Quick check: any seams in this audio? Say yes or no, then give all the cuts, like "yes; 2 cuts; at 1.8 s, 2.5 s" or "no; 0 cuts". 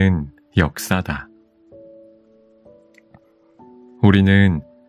no; 0 cuts